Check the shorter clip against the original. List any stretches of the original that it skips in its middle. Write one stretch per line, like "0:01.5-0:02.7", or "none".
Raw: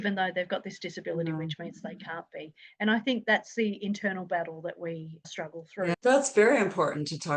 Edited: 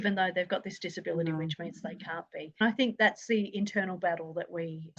0:02.6-0:02.9